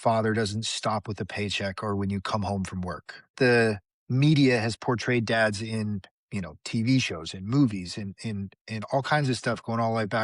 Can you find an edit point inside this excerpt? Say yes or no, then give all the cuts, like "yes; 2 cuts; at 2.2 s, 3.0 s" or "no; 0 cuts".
yes; 1 cut; at 3.3 s